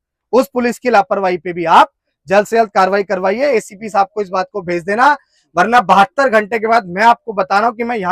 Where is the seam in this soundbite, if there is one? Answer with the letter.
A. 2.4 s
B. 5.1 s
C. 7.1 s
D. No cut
D